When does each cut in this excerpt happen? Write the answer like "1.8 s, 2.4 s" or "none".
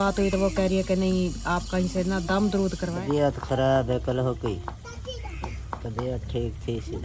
3.0 s